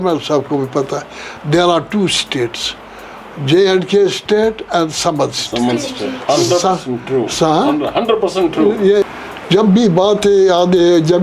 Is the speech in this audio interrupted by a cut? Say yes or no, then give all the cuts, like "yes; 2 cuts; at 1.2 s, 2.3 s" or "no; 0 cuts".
yes; 1 cut; at 9.1 s